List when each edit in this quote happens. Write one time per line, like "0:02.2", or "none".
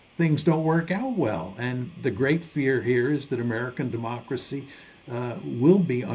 none